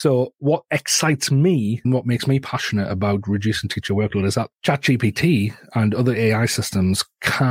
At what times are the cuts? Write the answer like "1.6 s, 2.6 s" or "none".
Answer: 1.8 s

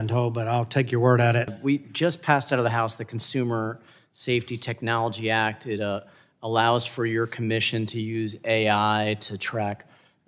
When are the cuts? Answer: none

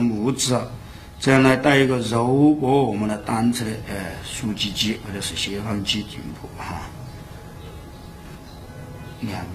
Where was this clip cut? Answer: none

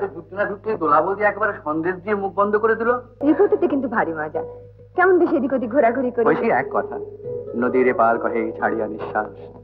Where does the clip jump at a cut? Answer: 3.2 s

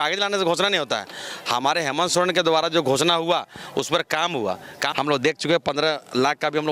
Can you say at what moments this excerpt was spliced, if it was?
4.8 s

